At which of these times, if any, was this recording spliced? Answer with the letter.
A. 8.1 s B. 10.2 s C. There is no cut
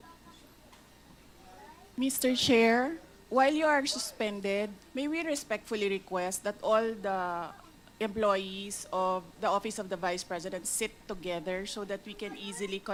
C